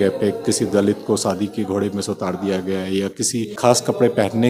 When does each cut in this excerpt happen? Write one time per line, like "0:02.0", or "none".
0:03.5